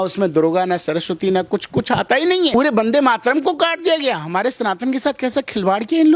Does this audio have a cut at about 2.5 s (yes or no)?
yes